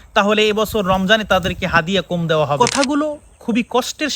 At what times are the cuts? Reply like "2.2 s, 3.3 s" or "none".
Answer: 2.6 s